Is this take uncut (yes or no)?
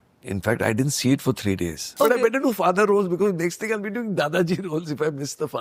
no